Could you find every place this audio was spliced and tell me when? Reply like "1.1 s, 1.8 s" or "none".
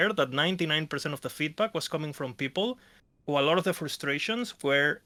none